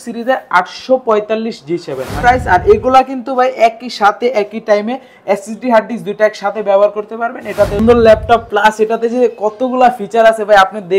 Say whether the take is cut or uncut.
cut